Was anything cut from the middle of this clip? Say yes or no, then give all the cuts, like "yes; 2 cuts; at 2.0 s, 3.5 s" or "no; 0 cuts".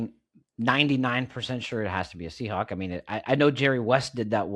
no; 0 cuts